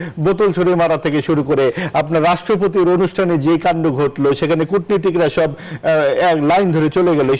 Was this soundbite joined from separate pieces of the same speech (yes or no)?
no